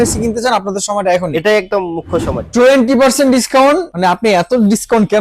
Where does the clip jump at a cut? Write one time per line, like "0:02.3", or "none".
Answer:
0:02.4
0:03.9